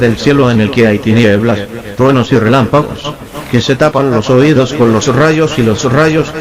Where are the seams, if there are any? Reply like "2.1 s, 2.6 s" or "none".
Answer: none